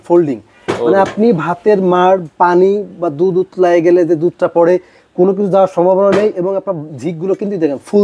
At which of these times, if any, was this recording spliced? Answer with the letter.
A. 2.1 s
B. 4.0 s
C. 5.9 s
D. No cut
D